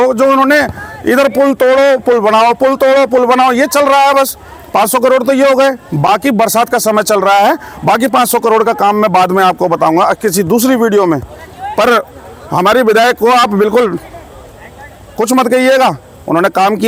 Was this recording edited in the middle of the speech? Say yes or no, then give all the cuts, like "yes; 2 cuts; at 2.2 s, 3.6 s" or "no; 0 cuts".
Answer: no; 0 cuts